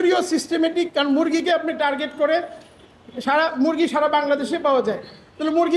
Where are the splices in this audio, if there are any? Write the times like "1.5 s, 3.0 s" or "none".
none